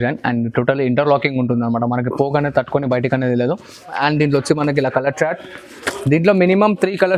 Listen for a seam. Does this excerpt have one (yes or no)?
yes